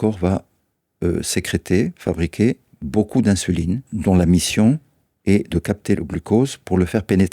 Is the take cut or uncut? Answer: cut